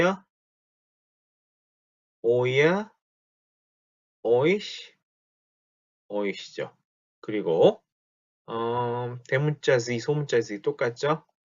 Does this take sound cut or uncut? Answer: cut